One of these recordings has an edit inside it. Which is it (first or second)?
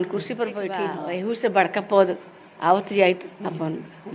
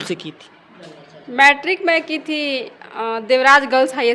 first